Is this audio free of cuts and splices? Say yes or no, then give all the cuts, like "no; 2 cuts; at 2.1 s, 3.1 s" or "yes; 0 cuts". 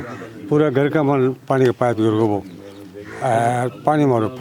yes; 0 cuts